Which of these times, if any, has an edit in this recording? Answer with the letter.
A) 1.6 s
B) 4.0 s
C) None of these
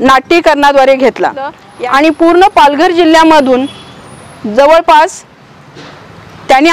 A